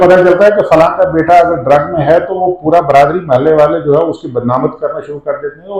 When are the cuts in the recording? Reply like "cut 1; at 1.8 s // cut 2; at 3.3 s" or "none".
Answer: none